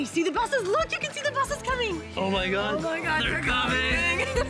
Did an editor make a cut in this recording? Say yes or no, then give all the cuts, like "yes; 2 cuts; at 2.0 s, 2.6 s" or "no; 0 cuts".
no; 0 cuts